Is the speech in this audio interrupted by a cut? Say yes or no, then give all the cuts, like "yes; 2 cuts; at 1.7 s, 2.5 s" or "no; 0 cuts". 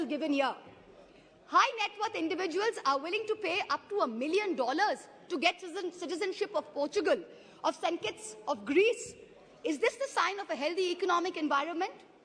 no; 0 cuts